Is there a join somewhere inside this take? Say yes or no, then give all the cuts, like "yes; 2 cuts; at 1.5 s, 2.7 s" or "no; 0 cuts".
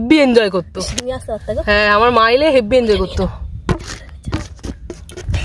no; 0 cuts